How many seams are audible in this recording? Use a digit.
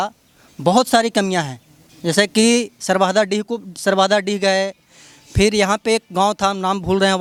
0